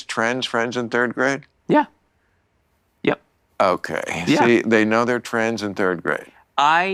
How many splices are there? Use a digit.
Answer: 0